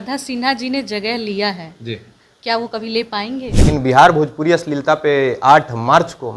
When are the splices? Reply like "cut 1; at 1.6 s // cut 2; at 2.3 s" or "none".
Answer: cut 1; at 3.5 s